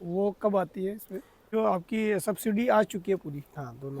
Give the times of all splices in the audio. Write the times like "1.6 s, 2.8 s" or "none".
1.5 s